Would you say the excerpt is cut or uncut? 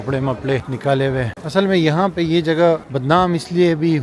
cut